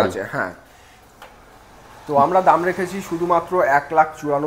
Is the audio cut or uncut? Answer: uncut